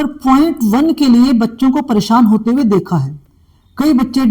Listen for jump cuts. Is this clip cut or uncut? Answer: uncut